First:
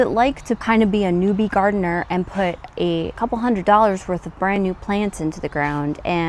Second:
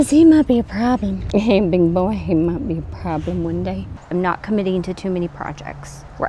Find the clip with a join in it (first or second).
second